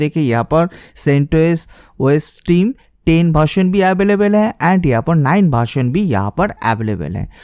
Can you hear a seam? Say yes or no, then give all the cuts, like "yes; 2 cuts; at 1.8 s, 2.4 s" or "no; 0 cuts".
no; 0 cuts